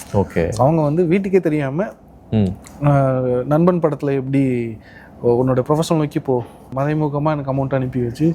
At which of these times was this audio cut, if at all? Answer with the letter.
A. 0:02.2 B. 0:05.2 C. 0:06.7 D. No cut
C